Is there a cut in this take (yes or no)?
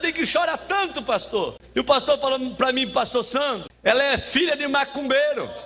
yes